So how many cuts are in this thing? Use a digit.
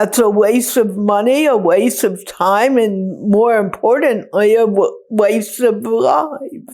0